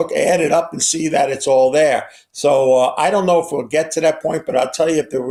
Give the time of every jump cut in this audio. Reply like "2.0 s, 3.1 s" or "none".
none